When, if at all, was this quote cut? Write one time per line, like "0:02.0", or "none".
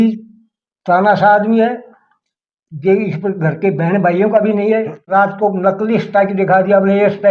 0:05.1